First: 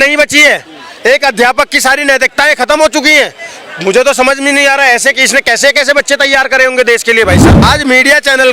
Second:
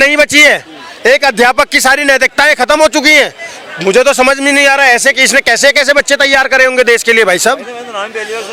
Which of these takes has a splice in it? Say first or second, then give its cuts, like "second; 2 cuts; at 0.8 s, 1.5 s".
first; 1 cut; at 7.5 s